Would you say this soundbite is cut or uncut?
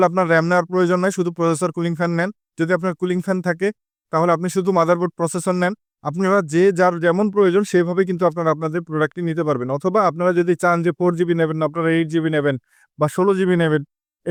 uncut